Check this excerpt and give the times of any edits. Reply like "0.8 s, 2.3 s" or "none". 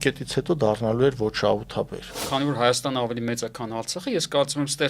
2.2 s